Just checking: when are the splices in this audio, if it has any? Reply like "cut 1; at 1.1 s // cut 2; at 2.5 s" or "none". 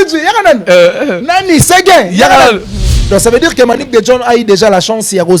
cut 1; at 2.9 s